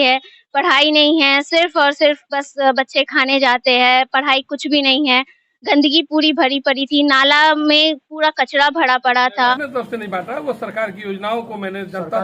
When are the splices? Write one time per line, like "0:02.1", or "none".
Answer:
0:09.5